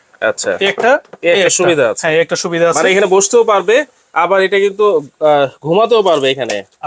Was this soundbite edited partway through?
no; 0 cuts

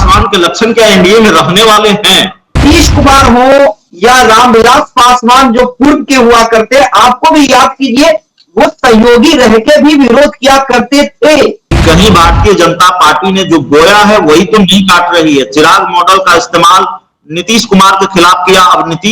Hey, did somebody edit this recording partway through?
yes; 2 cuts; at 2.6 s, 11.8 s

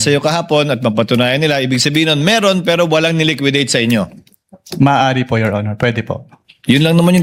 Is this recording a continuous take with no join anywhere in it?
yes; 0 cuts

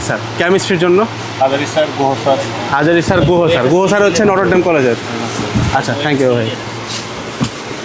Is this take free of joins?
yes; 0 cuts

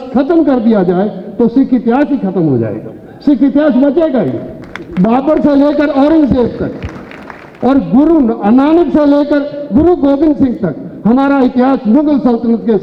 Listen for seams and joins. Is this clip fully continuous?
yes; 0 cuts

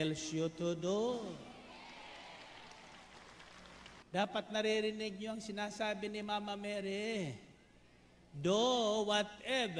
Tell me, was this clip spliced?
yes; 1 cut; at 4.0 s

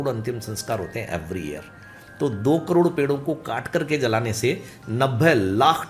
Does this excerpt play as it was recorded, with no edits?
yes; 0 cuts

